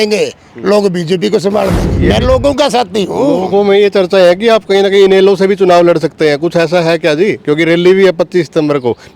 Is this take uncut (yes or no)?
no